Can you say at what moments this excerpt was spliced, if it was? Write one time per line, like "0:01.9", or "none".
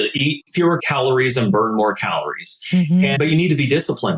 0:00.8
0:03.2